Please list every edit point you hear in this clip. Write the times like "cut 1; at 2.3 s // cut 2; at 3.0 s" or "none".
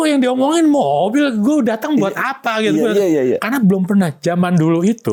none